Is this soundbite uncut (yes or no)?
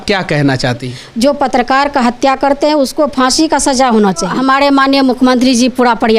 no